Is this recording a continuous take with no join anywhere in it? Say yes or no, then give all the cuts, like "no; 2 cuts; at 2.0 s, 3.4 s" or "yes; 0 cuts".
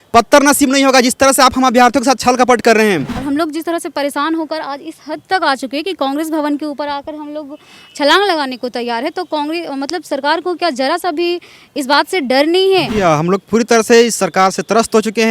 no; 2 cuts; at 3.2 s, 12.9 s